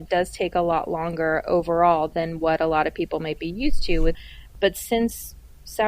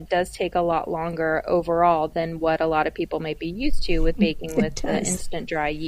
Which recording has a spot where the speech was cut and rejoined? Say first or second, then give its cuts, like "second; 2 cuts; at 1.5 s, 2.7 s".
first; 1 cut; at 4.2 s